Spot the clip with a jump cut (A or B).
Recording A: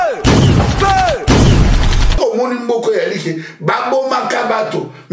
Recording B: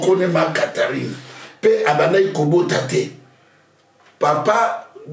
A